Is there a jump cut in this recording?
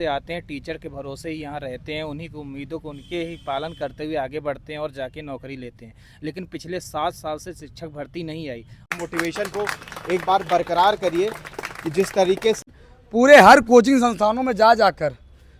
yes; 2 cuts; at 8.8 s, 12.6 s

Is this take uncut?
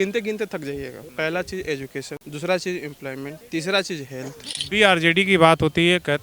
no; 4 cuts; at 1.0 s, 2.2 s, 3.4 s, 4.5 s

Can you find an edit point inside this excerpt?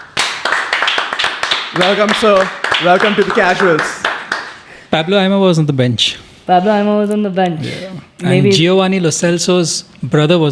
no; 0 cuts

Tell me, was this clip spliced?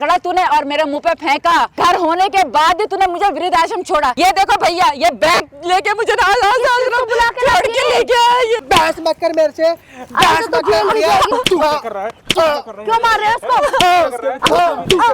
yes; 5 cuts; at 1.7 s, 4.1 s, 8.6 s, 11.3 s, 14.4 s

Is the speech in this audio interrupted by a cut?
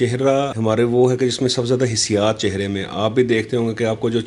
no; 0 cuts

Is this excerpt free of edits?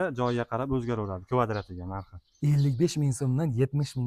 yes; 0 cuts

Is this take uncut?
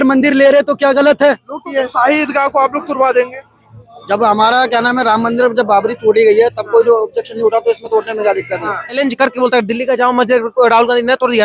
no; 2 cuts; at 1.7 s, 9.0 s

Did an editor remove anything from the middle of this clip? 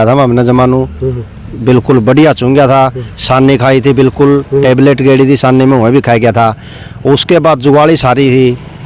no; 0 cuts

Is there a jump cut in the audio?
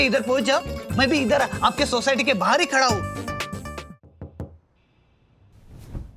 yes; 1 cut; at 3.7 s

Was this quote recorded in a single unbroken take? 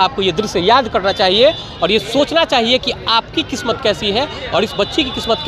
yes; 0 cuts

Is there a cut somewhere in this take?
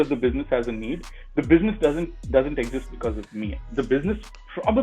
no; 0 cuts

